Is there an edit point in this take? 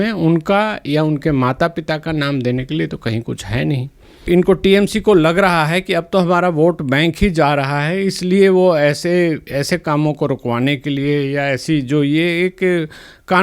yes; 1 cut; at 4.2 s

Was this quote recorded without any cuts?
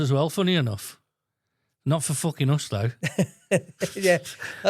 yes; 0 cuts

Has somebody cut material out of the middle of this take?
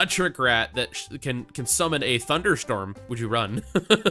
yes; 1 cut; at 3.0 s

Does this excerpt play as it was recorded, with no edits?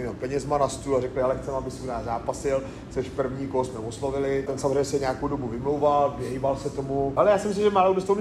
no; 2 cuts; at 4.5 s, 7.1 s

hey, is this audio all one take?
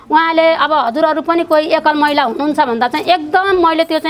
yes; 0 cuts

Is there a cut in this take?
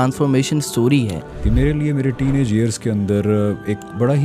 yes; 1 cut; at 1.3 s

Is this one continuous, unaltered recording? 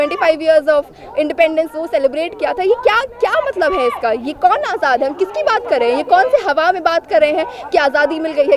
yes; 0 cuts

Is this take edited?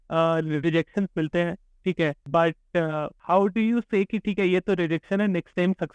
yes; 2 cuts; at 2.2 s, 3.1 s

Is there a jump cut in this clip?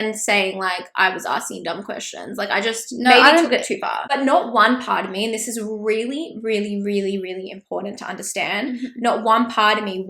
yes; 1 cut; at 3.9 s

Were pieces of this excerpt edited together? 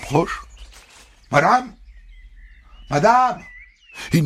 no; 0 cuts

